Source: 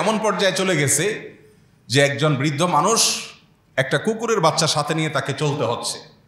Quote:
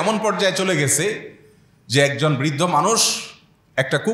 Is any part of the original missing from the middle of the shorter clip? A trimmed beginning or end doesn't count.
no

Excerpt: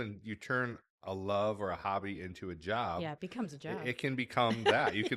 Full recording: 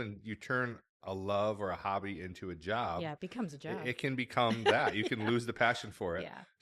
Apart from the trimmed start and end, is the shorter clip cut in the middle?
no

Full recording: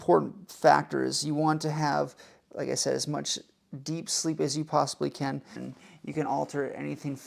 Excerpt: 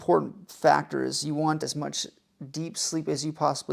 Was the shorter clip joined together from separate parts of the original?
yes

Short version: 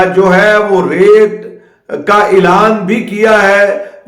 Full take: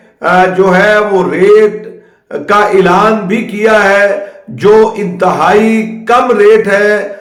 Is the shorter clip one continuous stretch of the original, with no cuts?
yes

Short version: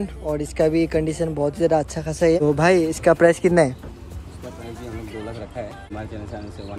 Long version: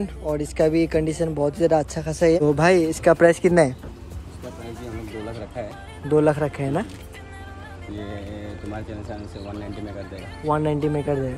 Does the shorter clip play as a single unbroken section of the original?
no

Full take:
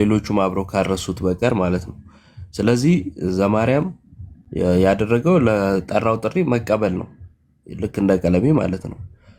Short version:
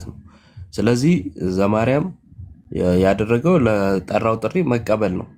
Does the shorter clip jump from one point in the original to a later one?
no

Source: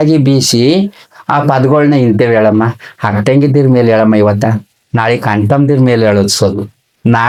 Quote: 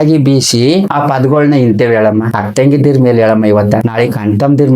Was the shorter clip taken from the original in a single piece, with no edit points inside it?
no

